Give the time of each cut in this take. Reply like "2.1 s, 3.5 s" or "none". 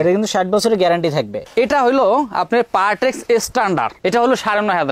none